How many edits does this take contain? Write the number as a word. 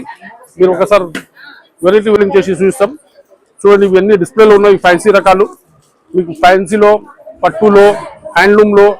one